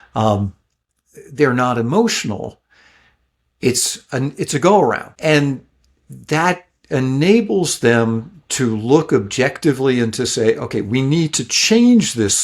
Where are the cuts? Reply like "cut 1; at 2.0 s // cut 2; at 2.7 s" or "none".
cut 1; at 5.1 s